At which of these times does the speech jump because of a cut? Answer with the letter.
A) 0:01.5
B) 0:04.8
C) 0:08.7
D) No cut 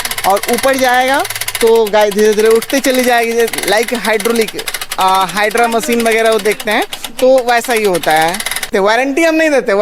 C